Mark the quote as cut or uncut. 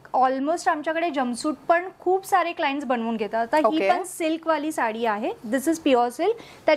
uncut